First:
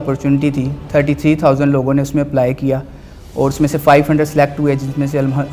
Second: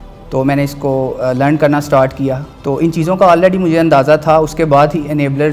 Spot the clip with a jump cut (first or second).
second